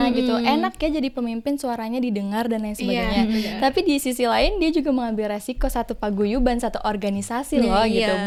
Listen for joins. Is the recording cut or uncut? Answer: uncut